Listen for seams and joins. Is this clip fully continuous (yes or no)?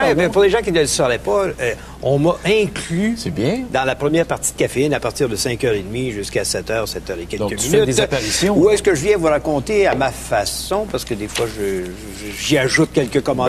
yes